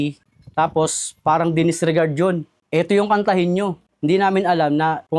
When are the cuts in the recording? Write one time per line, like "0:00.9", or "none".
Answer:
none